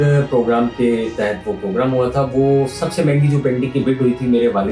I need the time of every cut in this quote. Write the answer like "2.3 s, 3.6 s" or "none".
none